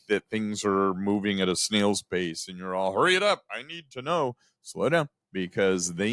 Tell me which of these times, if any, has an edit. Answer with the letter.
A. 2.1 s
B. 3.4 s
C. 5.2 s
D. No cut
C